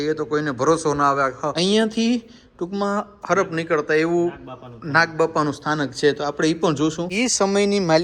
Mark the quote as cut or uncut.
cut